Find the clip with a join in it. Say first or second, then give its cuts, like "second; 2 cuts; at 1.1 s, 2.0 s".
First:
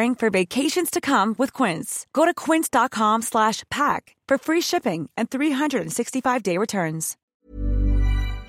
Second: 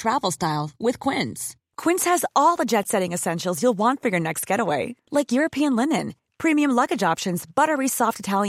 first; 1 cut; at 7.2 s